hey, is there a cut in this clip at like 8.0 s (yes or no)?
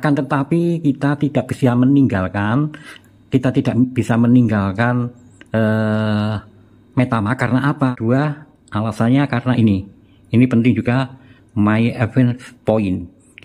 yes